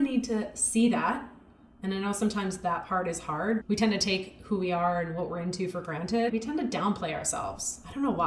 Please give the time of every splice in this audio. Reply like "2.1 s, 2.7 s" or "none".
6.3 s